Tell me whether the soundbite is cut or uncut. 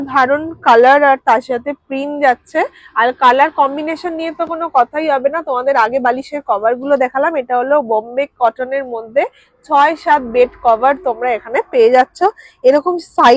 uncut